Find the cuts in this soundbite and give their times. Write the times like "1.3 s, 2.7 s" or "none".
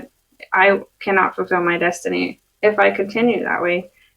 2.4 s

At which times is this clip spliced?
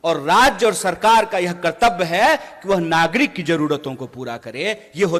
none

